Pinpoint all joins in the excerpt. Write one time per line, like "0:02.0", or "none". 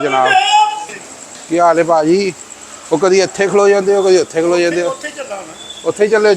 0:00.9